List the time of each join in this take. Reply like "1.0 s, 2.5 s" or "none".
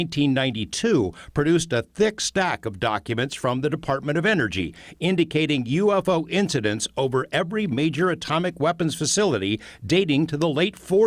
none